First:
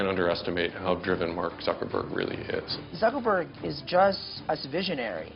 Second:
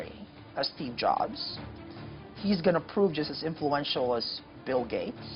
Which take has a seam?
first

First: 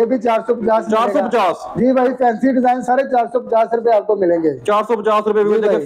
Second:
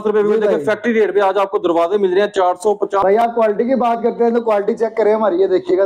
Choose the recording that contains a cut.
second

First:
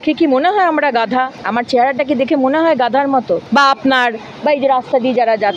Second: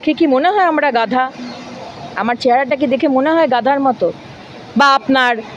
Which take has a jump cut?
first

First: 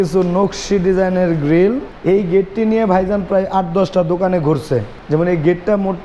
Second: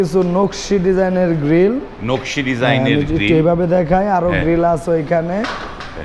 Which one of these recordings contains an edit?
first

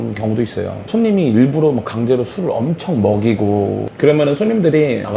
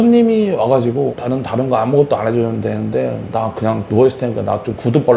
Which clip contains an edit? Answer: first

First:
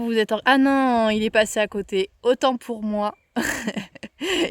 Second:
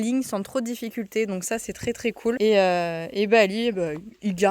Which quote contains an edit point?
second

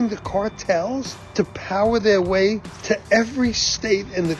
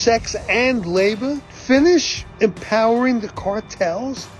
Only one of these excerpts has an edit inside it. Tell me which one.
second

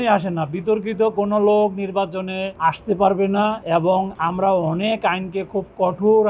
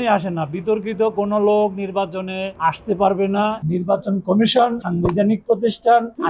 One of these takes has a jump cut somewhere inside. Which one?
second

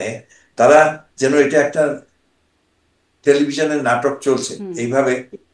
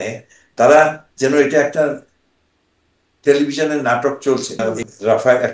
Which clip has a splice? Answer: second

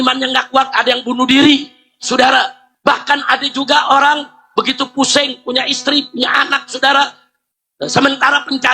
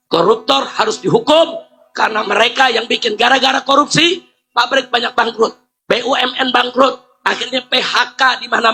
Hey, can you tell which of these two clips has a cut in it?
first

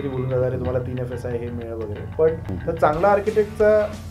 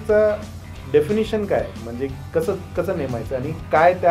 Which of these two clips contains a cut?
first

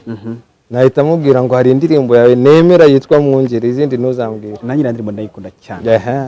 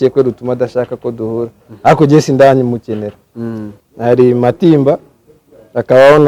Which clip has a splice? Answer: second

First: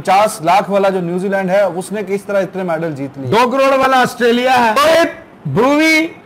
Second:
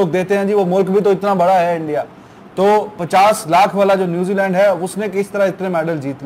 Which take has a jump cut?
first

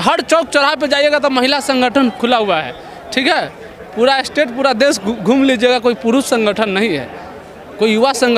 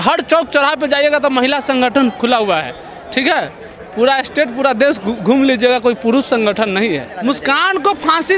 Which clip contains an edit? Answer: second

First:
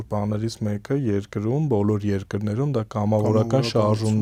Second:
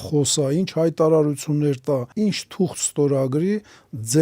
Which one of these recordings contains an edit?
second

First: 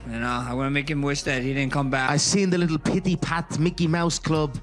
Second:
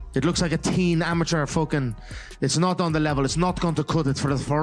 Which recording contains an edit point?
first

